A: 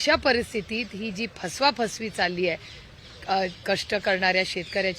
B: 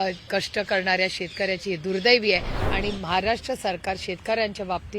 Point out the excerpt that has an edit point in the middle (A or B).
B